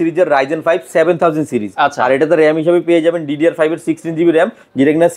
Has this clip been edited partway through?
no; 0 cuts

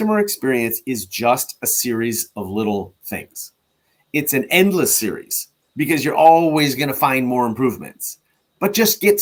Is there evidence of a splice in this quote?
no; 0 cuts

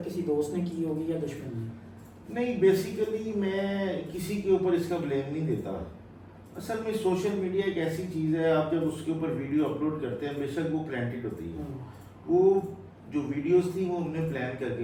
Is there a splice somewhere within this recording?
no; 0 cuts

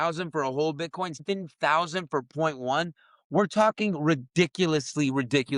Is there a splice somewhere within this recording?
yes; 1 cut; at 1.2 s

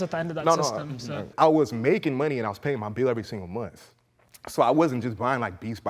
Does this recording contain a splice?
yes; 1 cut; at 1.3 s

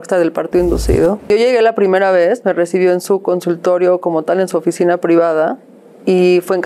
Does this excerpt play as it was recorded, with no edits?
no; 1 cut; at 1.3 s

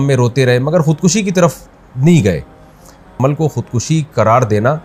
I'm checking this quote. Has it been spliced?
yes; 1 cut; at 3.1 s

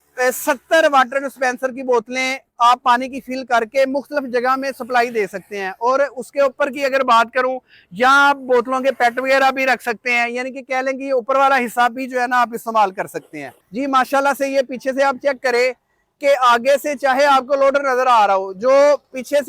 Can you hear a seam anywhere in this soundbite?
yes; 1 cut; at 13.5 s

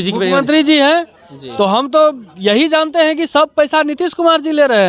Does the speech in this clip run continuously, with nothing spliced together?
yes; 0 cuts

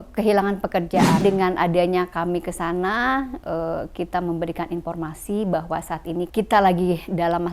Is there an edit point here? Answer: yes; 1 cut; at 1.2 s

